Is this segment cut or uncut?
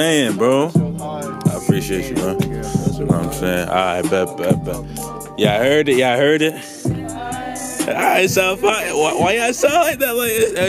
uncut